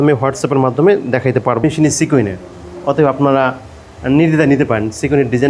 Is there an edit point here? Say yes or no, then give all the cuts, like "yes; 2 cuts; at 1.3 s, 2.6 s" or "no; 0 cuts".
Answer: yes; 1 cut; at 1.6 s